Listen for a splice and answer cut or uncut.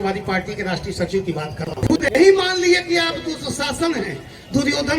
cut